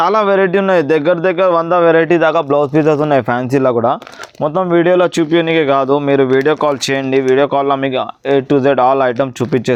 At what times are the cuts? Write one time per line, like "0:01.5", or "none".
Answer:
none